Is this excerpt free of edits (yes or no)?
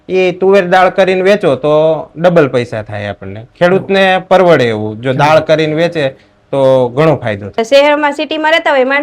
no